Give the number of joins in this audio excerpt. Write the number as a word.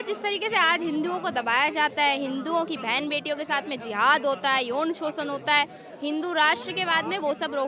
zero